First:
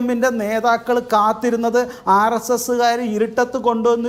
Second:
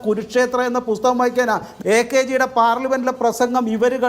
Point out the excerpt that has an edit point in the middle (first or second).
second